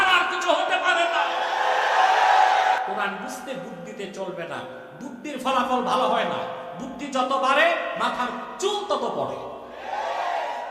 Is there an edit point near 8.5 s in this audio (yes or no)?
yes